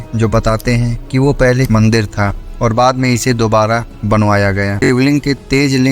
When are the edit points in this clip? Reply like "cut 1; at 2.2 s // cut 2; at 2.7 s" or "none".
cut 1; at 4.8 s